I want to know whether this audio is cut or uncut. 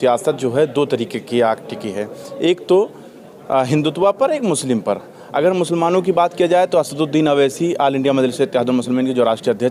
uncut